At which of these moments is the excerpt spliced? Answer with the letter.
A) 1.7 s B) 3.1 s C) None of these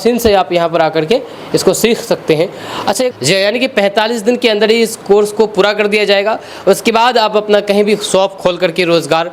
B